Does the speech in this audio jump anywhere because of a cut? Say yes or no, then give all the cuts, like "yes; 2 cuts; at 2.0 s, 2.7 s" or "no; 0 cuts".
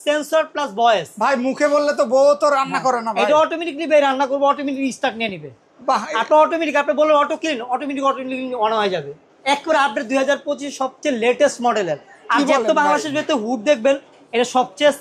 no; 0 cuts